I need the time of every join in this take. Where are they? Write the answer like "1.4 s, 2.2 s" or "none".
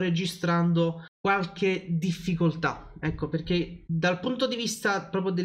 1.1 s, 3.8 s

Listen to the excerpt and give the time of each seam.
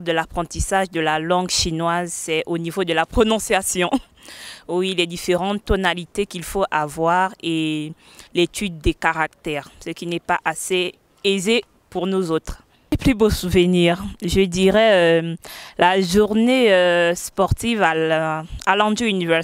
13.0 s

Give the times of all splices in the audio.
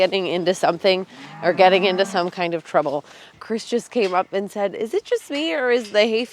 3.3 s

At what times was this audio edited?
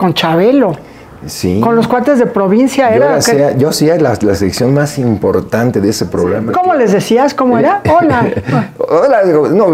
6.4 s

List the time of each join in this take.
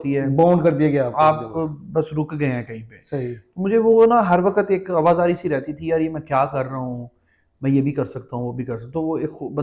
none

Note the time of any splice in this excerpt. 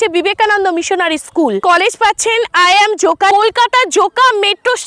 1.6 s, 3.3 s

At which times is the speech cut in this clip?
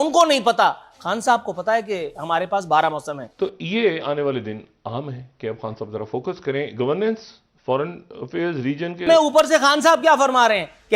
3.2 s, 9.0 s

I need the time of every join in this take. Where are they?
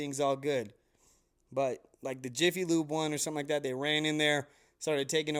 none

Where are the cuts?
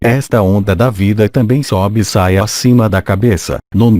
none

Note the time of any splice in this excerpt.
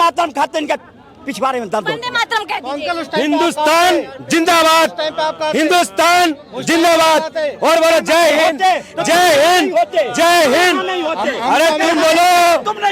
none

